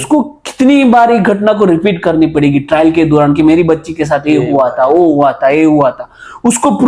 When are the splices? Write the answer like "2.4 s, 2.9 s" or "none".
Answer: none